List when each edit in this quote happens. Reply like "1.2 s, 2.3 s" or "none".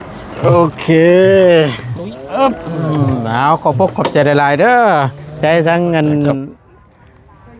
5.2 s